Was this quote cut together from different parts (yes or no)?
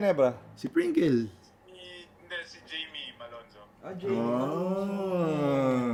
no